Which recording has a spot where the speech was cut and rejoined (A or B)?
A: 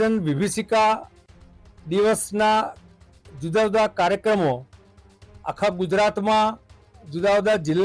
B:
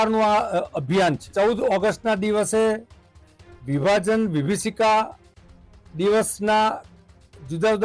B